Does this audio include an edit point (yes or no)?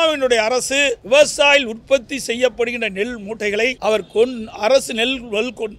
yes